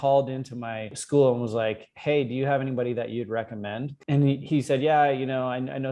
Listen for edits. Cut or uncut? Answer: cut